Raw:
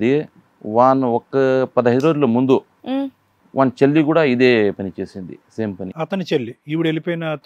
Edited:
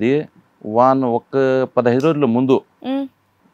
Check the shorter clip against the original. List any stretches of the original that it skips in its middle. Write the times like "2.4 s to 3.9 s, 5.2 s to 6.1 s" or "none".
none